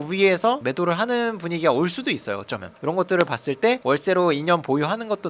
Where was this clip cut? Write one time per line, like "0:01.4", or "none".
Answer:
0:02.7